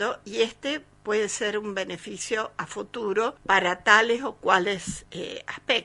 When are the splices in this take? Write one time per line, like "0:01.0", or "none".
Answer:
0:03.4